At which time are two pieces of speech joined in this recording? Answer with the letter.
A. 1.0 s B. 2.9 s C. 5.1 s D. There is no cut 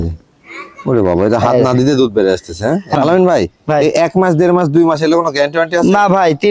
B